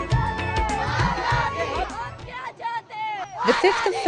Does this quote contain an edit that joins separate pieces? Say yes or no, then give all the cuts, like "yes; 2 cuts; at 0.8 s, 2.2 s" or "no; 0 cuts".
yes; 1 cut; at 2.9 s